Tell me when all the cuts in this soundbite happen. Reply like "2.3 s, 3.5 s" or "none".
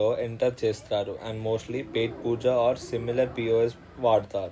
none